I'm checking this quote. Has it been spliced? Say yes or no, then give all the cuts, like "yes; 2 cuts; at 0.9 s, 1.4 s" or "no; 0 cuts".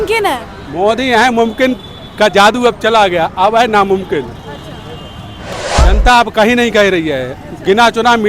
yes; 1 cut; at 5.7 s